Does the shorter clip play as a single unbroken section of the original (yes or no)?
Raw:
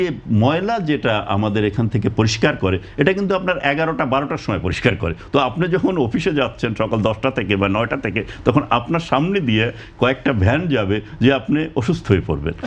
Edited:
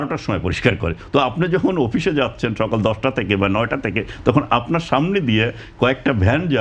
yes